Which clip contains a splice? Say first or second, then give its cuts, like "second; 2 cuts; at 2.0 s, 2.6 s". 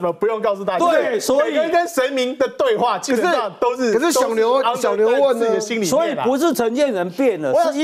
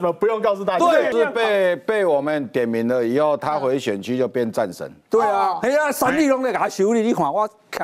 second; 1 cut; at 1.1 s